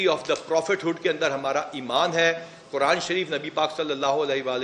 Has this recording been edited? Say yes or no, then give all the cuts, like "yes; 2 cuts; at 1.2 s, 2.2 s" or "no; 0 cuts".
no; 0 cuts